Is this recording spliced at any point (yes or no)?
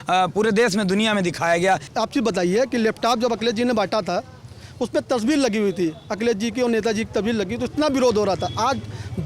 yes